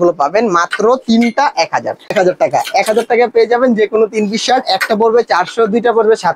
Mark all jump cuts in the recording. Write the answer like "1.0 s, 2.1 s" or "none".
2.1 s